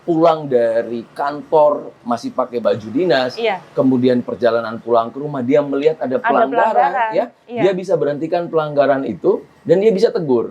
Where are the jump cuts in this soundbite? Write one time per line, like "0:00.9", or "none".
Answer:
0:02.6